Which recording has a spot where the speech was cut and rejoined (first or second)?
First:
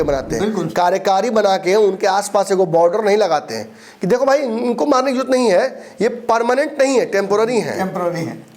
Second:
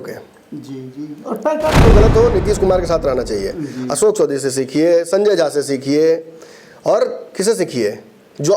second